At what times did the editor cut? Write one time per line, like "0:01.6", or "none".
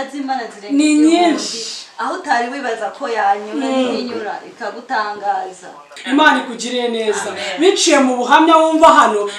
0:05.9